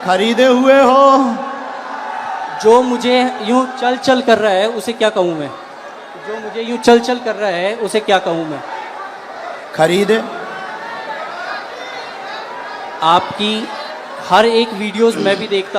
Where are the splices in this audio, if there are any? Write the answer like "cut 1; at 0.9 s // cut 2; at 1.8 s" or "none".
none